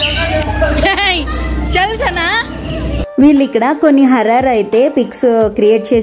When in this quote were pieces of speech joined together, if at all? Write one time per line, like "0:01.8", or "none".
0:03.0